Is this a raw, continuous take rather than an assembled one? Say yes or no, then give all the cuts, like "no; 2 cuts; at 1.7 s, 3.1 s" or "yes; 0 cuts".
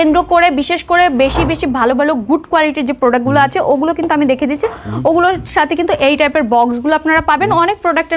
yes; 0 cuts